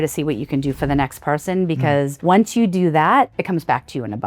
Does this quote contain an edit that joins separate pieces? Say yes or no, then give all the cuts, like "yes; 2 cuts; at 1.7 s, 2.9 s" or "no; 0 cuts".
yes; 2 cuts; at 2.1 s, 3.3 s